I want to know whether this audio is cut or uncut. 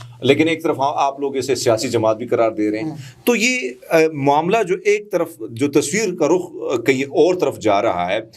uncut